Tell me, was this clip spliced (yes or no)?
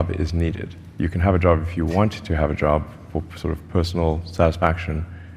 no